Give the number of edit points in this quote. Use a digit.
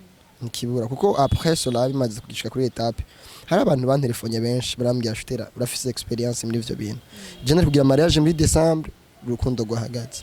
0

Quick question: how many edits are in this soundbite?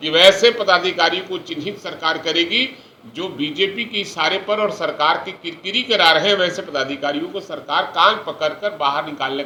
0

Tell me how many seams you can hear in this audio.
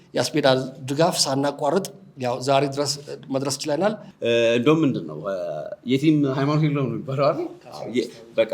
1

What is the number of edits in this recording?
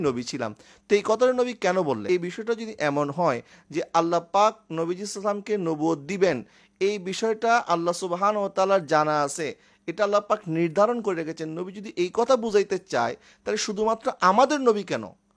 1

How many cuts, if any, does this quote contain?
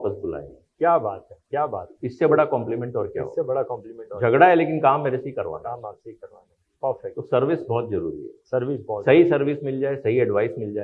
0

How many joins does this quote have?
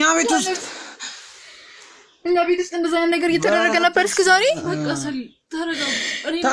0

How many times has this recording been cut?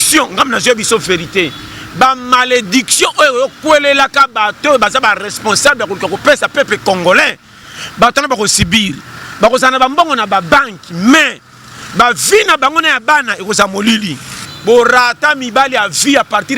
1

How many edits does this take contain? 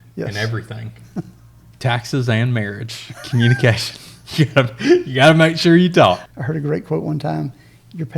1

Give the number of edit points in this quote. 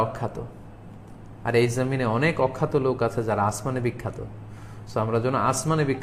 0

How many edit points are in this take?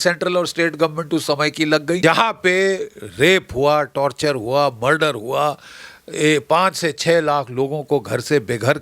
1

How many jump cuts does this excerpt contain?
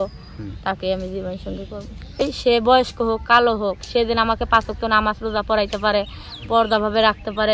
1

